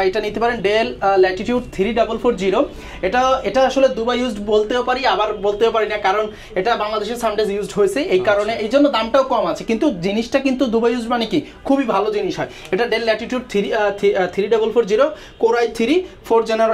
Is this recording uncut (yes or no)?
yes